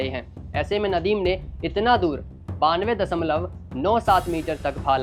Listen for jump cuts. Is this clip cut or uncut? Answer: uncut